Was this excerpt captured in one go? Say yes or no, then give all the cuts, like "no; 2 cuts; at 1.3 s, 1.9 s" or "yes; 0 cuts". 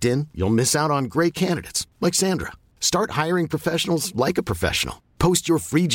yes; 0 cuts